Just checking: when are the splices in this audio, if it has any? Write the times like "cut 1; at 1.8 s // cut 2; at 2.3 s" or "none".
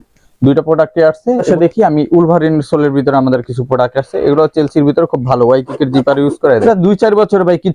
cut 1; at 1.5 s // cut 2; at 6.6 s

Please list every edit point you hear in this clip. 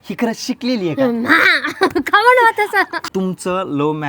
cut 1; at 3.0 s

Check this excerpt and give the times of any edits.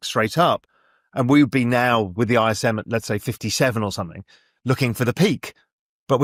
none

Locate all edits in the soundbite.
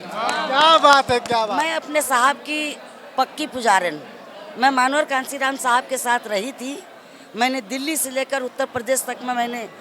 cut 1; at 1.7 s

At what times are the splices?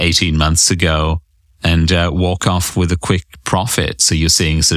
none

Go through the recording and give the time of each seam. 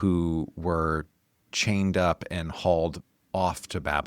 none

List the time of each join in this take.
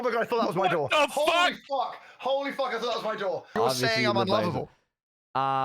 cut 1; at 3.6 s

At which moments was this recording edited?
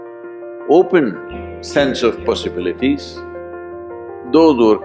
cut 1; at 3.6 s

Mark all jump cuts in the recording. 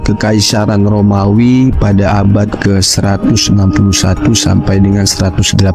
none

